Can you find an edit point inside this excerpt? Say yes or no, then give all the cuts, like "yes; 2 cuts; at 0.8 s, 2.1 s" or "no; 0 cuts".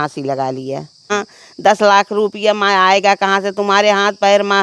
yes; 1 cut; at 1.1 s